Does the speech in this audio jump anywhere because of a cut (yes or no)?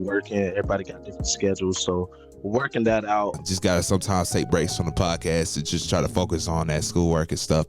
yes